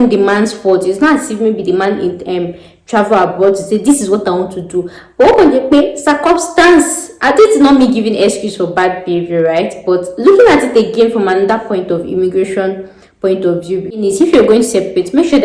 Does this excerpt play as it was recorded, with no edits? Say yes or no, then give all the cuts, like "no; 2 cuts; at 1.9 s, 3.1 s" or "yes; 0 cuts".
no; 1 cut; at 14.0 s